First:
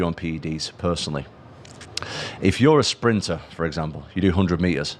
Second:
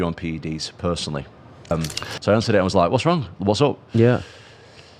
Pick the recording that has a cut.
second; 1 cut; at 1.7 s

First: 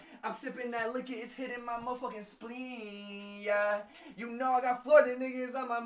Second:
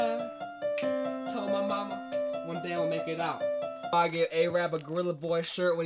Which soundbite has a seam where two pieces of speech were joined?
second; 1 cut; at 3.9 s

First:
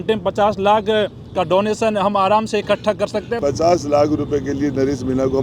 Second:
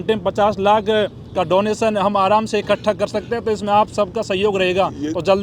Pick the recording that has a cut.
first; 1 cut; at 3.4 s

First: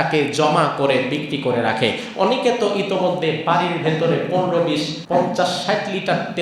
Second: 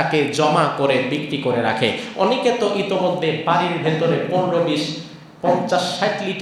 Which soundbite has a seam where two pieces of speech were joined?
first; 1 cut; at 5.0 s

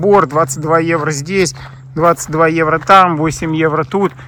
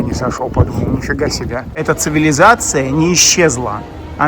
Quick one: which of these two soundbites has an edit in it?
second; 1 cut; at 1.8 s

